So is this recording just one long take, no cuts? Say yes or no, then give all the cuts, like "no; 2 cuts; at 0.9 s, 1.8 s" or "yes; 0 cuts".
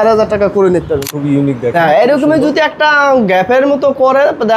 no; 1 cut; at 1.1 s